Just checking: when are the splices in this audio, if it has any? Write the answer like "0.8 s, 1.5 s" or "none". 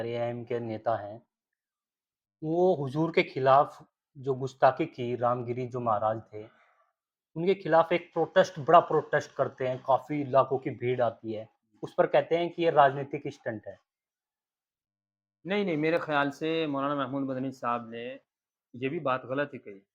none